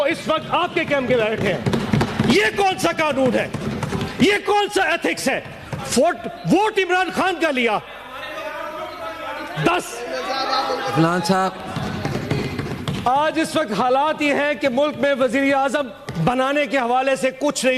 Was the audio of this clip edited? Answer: yes; 1 cut; at 11.7 s

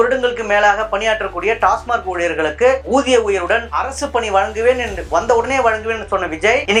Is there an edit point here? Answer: no; 0 cuts

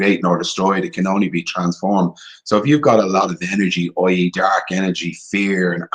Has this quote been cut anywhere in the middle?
no; 0 cuts

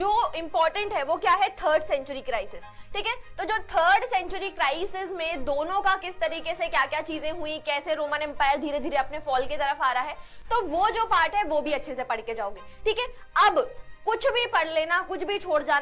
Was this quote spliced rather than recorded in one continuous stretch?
no; 0 cuts

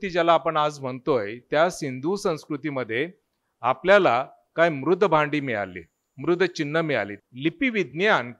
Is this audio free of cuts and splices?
no; 1 cut; at 7.2 s

